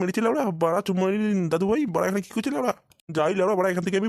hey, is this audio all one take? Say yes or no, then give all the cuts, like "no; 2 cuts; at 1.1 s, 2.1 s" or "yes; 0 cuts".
yes; 0 cuts